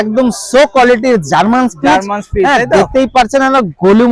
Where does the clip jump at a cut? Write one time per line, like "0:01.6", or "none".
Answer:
none